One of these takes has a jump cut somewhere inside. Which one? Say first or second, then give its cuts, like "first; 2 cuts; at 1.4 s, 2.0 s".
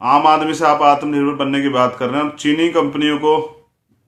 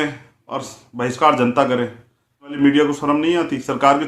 second; 1 cut; at 2.6 s